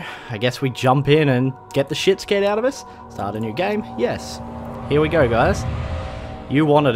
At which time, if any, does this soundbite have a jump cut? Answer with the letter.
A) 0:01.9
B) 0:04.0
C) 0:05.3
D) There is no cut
D